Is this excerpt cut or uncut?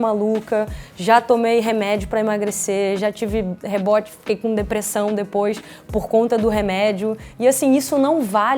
uncut